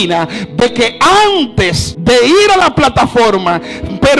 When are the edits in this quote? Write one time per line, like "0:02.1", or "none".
0:01.9